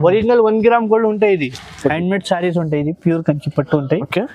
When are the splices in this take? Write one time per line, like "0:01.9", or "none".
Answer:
0:01.7